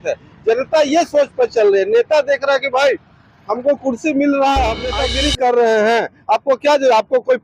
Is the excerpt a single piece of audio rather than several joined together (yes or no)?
no